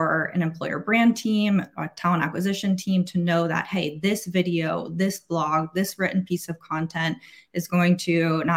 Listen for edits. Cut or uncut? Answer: uncut